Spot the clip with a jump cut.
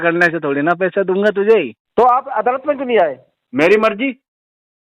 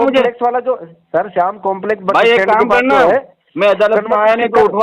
first; 1 cut; at 1.8 s

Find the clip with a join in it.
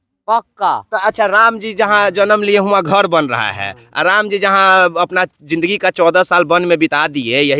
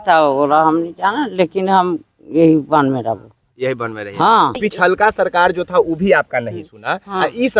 second; 1 cut; at 4.6 s

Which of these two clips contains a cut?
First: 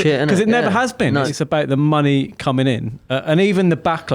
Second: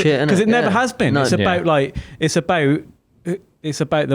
first; 1 cut; at 1.3 s

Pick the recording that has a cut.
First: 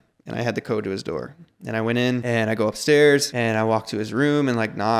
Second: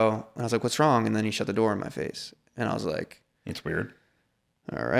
first; 2 cuts; at 2.2 s, 3.3 s

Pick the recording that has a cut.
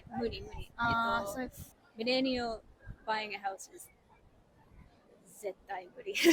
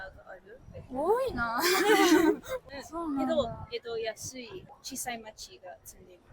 second; 2 cuts; at 2.6 s, 4.7 s

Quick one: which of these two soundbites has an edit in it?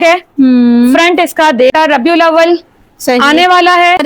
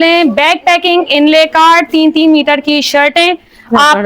first; 1 cut; at 1.7 s

